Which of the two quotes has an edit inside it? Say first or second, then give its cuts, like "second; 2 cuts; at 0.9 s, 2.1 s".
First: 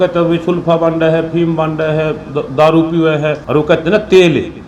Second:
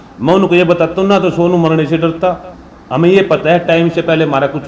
first; 1 cut; at 3.4 s